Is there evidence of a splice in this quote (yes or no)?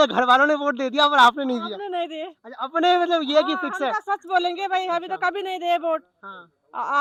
no